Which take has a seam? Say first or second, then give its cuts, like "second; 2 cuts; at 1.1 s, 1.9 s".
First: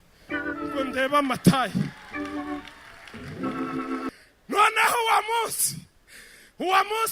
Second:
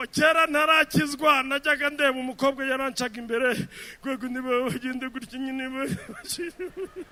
first; 1 cut; at 4.3 s